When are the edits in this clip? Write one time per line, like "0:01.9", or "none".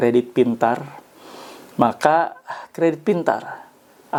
none